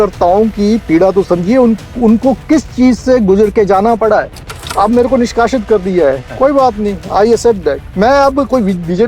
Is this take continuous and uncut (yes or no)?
no